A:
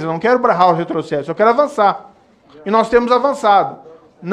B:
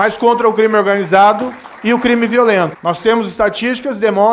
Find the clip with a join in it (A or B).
B